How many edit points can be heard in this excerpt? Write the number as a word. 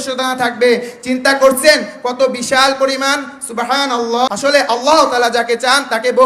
one